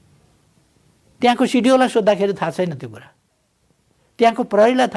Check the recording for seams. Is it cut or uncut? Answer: uncut